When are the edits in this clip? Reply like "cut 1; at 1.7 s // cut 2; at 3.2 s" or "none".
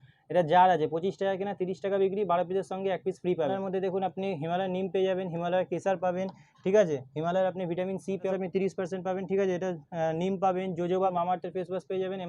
cut 1; at 3.5 s // cut 2; at 8.3 s // cut 3; at 11.1 s